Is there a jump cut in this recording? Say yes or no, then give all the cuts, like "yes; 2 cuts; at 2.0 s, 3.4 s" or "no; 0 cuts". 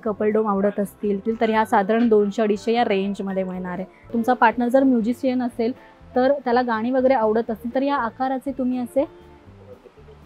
yes; 2 cuts; at 1.2 s, 4.1 s